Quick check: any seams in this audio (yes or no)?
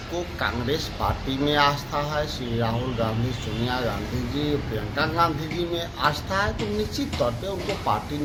no